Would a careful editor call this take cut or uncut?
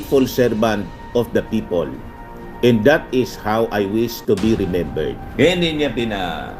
cut